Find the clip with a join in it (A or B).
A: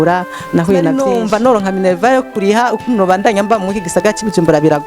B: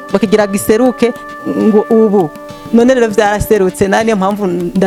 A